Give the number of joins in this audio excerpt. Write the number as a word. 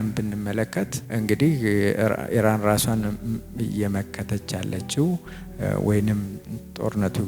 one